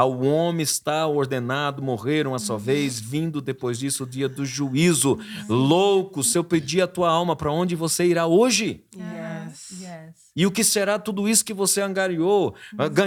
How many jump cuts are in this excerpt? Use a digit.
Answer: 0